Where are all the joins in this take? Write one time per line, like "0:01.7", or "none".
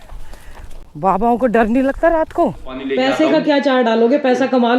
0:02.8